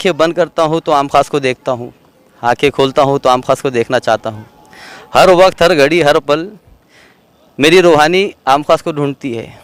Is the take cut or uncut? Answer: uncut